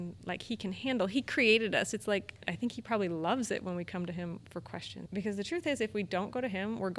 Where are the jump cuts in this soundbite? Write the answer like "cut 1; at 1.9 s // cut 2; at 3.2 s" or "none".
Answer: cut 1; at 2.4 s // cut 2; at 5.0 s